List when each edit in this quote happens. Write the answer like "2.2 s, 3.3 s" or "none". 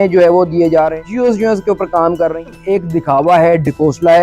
1.0 s, 2.4 s